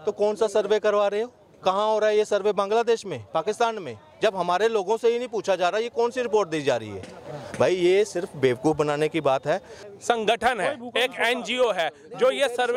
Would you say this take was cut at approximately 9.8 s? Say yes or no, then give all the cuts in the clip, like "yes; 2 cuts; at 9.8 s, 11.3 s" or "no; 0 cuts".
yes; 1 cut; at 9.8 s